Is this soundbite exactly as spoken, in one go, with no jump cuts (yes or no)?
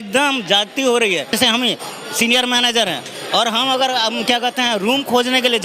no